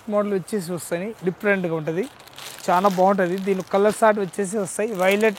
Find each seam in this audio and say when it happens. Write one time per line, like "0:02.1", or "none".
none